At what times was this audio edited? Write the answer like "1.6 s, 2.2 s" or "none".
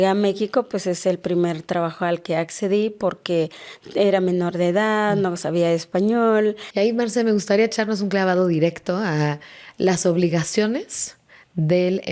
6.6 s